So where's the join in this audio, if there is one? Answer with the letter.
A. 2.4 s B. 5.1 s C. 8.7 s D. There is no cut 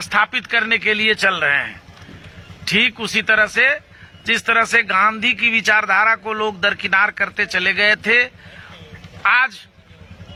D